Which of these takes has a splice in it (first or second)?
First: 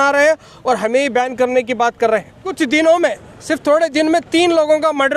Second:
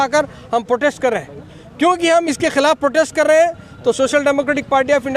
first